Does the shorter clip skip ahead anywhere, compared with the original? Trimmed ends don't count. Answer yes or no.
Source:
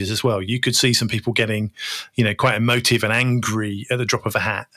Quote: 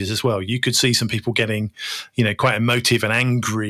no